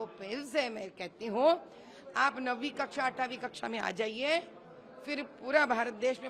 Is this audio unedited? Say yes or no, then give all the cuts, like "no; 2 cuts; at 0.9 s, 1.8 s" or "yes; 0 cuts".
yes; 0 cuts